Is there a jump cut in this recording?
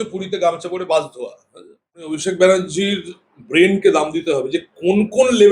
yes; 1 cut; at 1.9 s

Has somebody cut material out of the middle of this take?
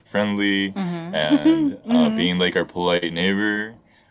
no; 0 cuts

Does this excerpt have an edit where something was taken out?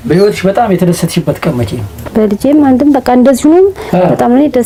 no; 0 cuts

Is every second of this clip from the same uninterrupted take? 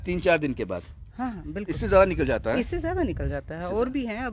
yes; 0 cuts

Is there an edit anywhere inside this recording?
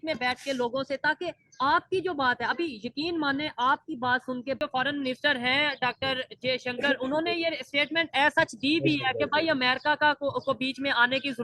yes; 1 cut; at 4.6 s

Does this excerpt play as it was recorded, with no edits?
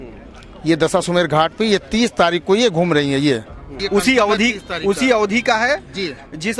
yes; 0 cuts

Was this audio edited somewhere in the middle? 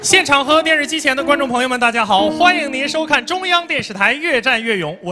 no; 0 cuts

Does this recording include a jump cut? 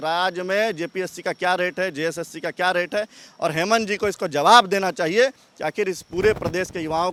no; 0 cuts

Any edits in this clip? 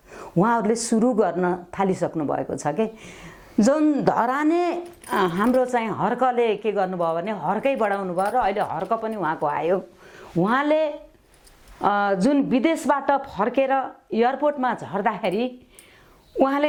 no; 0 cuts

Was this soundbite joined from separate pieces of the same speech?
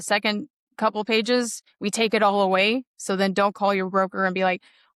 yes; 1 cut; at 1.6 s

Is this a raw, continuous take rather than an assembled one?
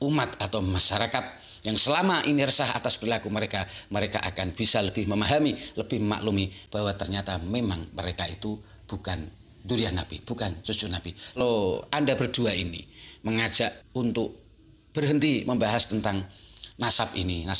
no; 1 cut; at 11.4 s

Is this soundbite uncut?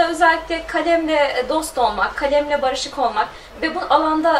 no; 1 cut; at 3.4 s

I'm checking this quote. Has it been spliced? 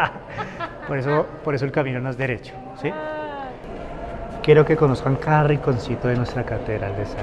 yes; 1 cut; at 3.7 s

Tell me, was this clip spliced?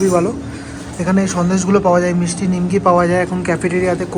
no; 0 cuts

